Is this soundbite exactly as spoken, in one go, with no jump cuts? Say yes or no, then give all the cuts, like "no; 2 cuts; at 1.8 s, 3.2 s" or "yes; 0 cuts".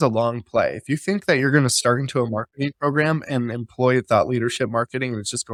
yes; 0 cuts